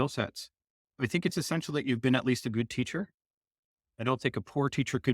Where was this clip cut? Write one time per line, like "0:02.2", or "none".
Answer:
0:01.0